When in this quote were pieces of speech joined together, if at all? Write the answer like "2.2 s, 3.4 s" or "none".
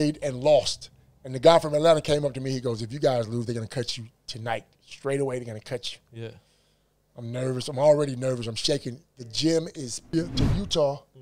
10.1 s